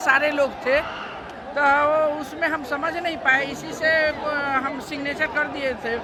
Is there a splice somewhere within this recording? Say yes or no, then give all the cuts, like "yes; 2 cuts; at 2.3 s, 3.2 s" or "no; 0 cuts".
no; 0 cuts